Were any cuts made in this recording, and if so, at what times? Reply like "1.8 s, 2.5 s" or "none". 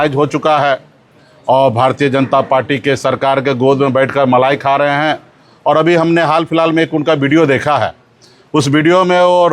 none